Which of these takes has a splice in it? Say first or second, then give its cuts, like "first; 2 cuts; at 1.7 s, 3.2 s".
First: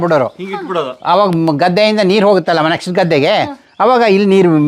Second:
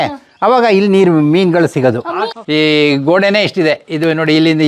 second; 1 cut; at 2.4 s